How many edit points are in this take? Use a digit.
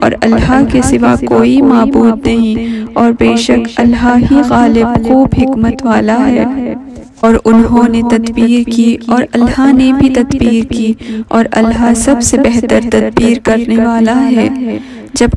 1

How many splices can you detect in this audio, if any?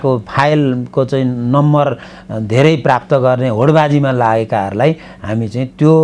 0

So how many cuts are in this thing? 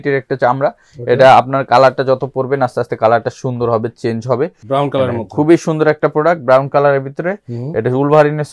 1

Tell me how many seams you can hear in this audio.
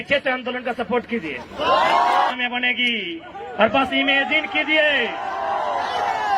1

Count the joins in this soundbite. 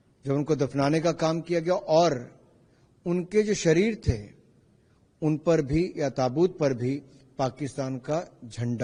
0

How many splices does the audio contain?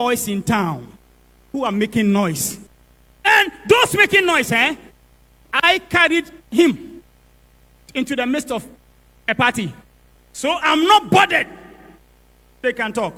0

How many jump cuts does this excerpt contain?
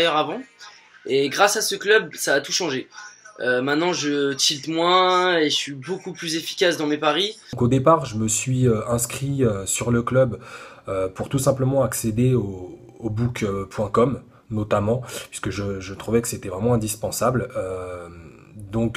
1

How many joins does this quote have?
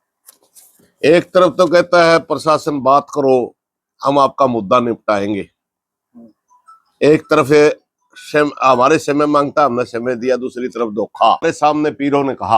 1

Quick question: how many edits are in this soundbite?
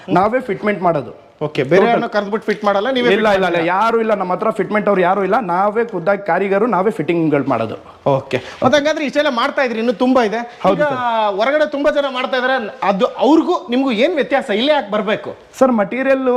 0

